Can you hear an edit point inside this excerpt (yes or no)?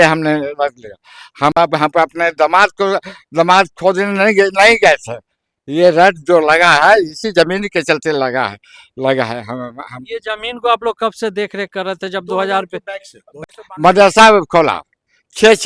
no